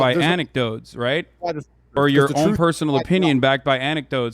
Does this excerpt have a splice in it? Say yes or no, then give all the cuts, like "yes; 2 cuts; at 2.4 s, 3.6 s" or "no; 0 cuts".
yes; 1 cut; at 1.7 s